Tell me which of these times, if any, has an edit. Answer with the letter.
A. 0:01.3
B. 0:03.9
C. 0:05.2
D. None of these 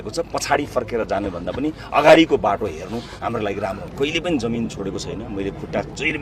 B